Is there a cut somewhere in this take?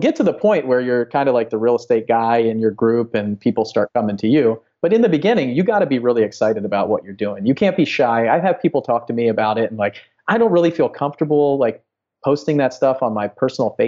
no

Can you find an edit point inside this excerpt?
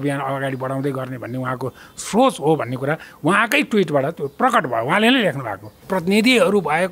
yes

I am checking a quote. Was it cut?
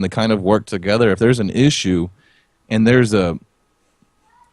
no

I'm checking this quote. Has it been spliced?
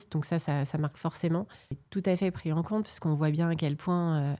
yes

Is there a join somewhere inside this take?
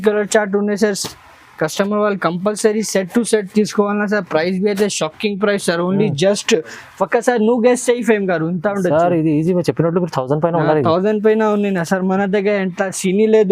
no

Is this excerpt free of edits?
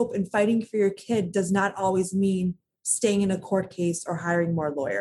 yes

